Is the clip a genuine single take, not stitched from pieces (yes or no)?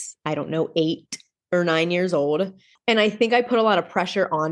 no